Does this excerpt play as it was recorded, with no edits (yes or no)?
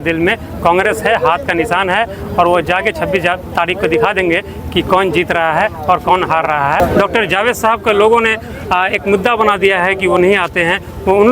no